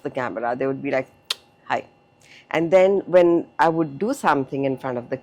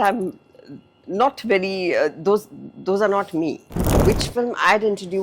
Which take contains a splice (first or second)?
second